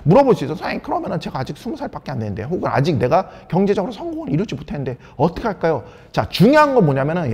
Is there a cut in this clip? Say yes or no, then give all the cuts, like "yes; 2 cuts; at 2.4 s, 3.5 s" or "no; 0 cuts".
no; 0 cuts